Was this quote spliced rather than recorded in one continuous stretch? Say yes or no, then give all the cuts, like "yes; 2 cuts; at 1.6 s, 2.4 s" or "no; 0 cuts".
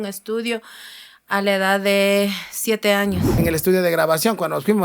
yes; 1 cut; at 3.3 s